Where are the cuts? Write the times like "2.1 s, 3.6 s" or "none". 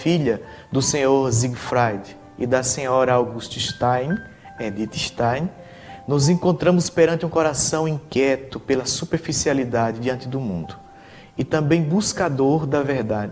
5.6 s